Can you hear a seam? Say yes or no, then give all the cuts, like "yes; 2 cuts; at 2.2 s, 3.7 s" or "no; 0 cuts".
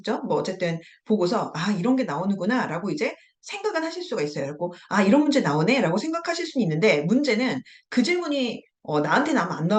no; 0 cuts